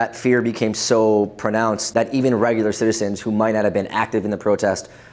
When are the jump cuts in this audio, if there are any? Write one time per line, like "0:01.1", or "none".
0:01.8

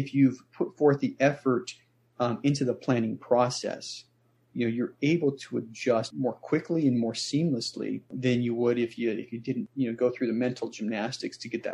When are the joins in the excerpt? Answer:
0:06.1
0:08.1
0:09.6

